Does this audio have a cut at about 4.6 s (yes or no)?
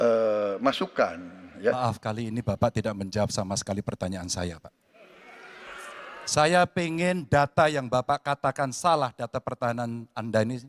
no